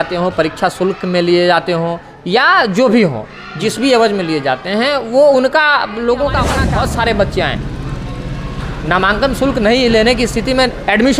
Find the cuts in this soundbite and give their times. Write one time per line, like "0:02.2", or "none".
0:06.6